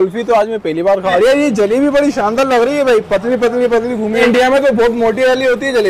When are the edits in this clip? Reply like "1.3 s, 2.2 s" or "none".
1.1 s, 4.2 s